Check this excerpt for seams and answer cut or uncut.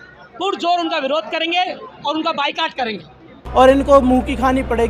cut